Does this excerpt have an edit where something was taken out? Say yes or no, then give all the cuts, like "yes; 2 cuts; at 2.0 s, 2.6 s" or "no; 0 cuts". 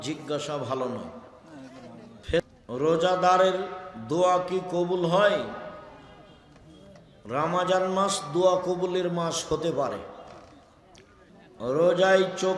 yes; 2 cuts; at 2.4 s, 11.3 s